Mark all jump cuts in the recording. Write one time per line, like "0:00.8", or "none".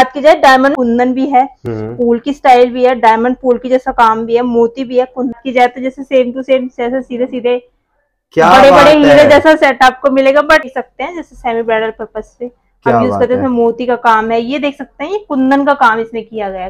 0:00.7
0:05.4
0:10.8